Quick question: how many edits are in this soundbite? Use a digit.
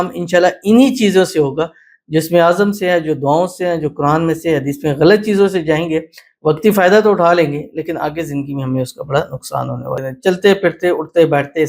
1